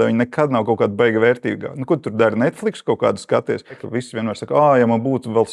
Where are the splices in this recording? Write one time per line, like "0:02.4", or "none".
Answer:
0:03.8